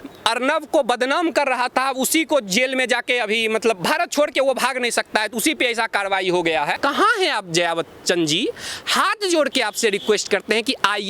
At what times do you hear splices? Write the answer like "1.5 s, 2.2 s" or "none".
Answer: 6.8 s